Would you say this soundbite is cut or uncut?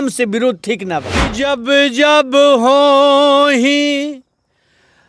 cut